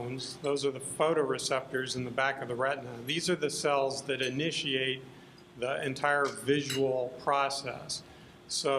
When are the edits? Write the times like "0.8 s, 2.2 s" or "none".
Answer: 3.5 s